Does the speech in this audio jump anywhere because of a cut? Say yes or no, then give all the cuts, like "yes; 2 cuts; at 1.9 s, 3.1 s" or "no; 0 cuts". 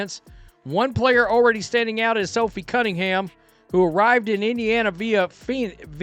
no; 0 cuts